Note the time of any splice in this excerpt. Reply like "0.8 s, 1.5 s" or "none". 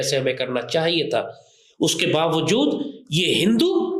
none

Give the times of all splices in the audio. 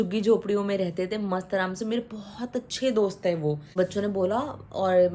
3.7 s

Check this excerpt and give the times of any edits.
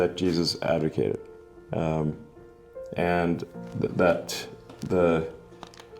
3.5 s

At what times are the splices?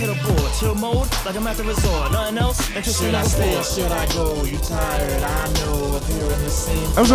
none

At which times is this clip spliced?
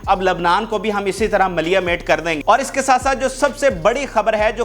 2.4 s

